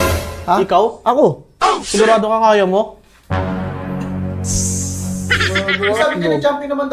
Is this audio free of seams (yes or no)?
yes